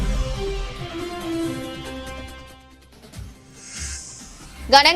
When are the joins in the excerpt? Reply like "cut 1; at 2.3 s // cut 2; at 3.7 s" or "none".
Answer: cut 1; at 2.1 s // cut 2; at 3.5 s